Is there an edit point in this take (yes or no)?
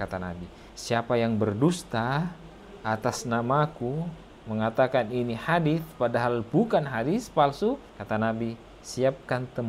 no